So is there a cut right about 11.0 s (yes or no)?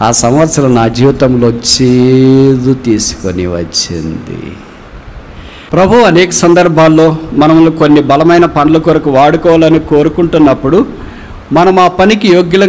no